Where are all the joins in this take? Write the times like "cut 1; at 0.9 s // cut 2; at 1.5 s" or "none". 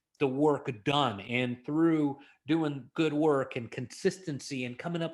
none